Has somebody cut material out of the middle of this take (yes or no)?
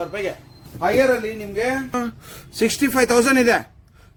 no